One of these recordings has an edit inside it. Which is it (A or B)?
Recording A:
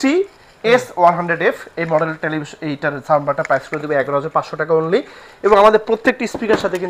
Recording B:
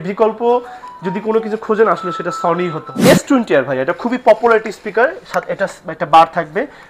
B